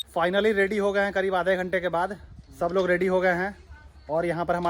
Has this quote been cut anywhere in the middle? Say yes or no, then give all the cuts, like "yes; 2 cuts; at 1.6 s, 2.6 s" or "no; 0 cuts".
no; 0 cuts